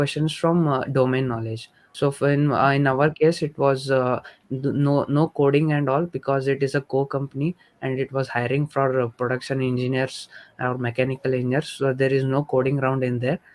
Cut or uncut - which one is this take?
uncut